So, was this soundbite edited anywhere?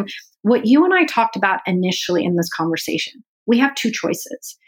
no; 0 cuts

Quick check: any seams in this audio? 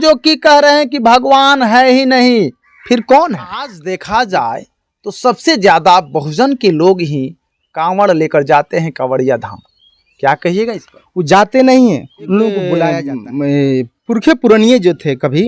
yes; 2 cuts; at 3.8 s, 13.0 s

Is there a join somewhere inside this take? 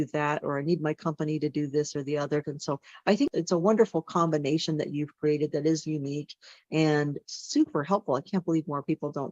yes; 1 cut; at 2.4 s

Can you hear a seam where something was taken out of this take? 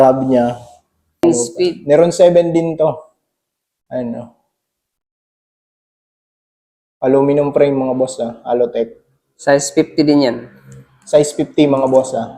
yes; 1 cut; at 1.2 s

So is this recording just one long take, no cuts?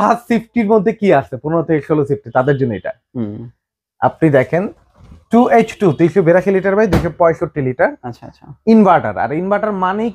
yes; 0 cuts

